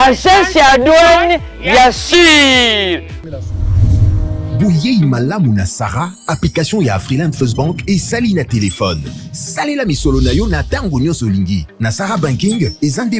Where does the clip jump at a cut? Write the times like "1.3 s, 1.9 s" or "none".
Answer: 3.3 s